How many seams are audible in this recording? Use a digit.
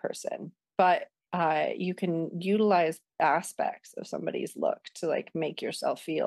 1